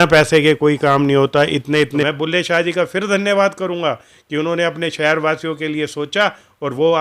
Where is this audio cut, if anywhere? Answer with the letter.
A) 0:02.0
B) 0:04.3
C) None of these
A